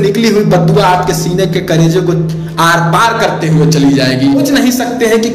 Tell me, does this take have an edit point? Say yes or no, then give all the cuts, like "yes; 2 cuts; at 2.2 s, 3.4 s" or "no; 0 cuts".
yes; 1 cut; at 4.5 s